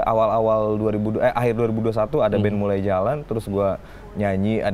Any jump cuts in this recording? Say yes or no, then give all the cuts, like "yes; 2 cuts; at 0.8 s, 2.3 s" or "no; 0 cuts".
no; 0 cuts